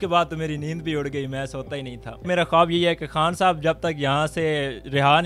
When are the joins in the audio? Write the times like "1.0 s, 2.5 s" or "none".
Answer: 2.3 s